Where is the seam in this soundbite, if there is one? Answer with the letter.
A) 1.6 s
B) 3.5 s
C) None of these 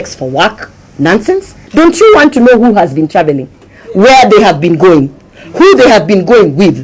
A